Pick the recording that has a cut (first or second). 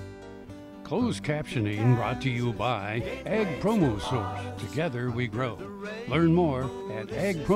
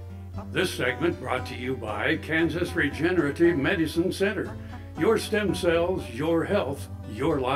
first